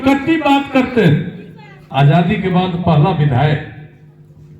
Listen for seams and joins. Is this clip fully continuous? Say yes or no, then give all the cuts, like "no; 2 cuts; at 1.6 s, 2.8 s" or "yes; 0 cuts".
no; 1 cut; at 1.8 s